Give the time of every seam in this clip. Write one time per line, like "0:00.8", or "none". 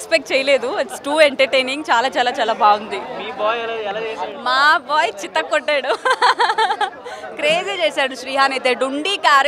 none